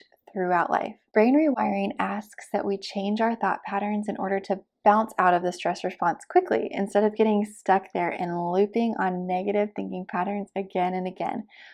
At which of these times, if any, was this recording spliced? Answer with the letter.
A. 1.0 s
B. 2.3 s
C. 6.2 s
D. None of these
A